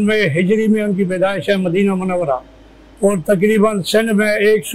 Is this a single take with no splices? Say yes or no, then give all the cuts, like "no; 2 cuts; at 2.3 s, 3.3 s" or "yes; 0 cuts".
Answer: yes; 0 cuts